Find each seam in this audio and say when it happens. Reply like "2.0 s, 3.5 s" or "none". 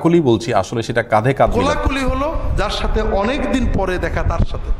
1.5 s